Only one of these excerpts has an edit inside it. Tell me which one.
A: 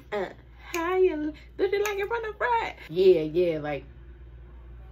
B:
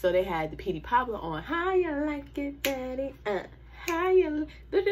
A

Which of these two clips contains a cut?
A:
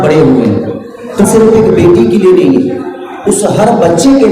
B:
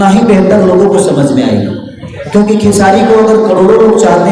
A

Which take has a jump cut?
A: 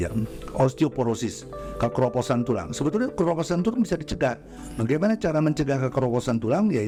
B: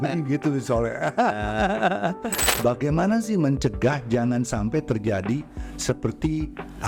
B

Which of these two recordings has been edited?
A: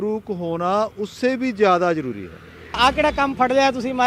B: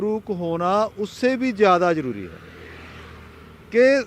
A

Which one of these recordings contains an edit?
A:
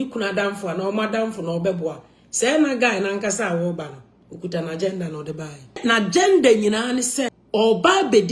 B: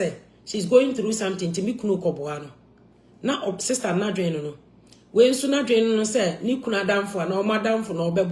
A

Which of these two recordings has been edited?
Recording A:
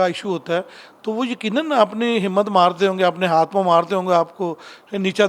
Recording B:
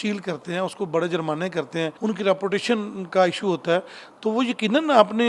B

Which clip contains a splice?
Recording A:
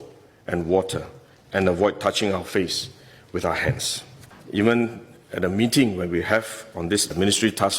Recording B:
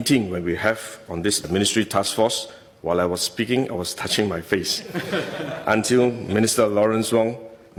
A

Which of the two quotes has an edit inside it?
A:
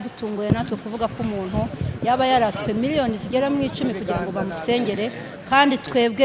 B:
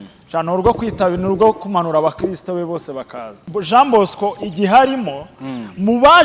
B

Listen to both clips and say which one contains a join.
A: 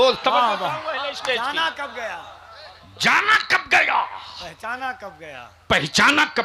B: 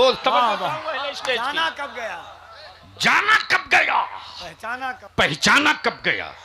B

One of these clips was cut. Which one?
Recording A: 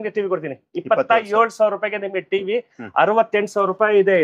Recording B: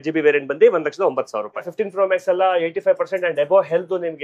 B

